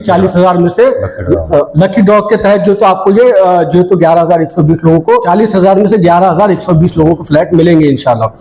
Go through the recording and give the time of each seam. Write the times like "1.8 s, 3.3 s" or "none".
5.2 s